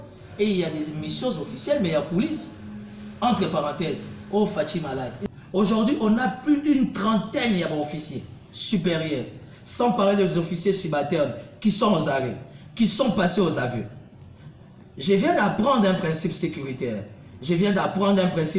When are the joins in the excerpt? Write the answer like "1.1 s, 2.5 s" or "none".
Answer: 5.2 s